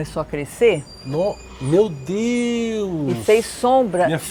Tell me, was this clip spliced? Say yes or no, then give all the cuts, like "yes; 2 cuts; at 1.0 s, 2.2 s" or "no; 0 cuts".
no; 0 cuts